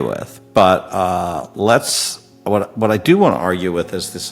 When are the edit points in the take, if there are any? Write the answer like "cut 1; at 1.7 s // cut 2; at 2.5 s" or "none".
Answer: none